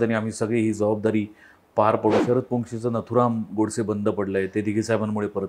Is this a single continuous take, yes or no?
no